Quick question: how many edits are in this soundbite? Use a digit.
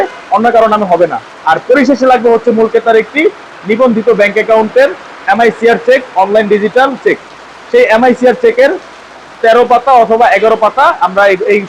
0